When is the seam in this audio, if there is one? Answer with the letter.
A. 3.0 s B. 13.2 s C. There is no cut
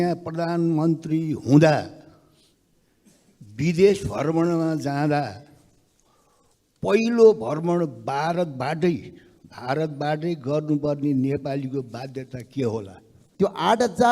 B